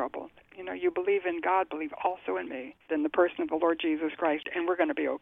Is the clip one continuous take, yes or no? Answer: no